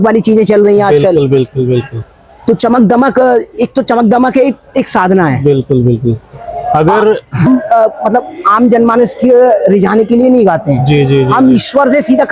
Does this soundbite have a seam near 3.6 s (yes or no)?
no